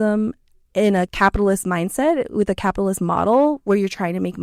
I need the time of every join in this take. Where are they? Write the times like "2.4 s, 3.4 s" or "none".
1.1 s